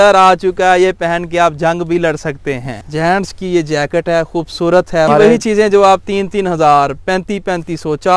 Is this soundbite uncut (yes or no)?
no